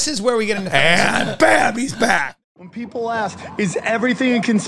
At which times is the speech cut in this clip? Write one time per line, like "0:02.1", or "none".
0:02.3